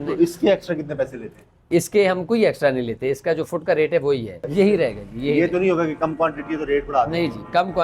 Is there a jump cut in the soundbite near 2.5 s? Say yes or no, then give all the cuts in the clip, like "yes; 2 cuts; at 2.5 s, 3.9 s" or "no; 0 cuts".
no; 1 cut; at 4.4 s